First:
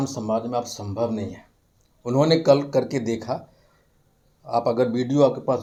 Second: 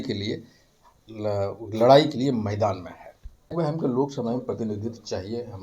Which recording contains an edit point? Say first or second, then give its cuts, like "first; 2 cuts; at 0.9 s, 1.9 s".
second; 1 cut; at 3.5 s